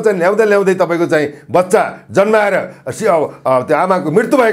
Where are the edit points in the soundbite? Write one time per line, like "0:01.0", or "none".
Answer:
none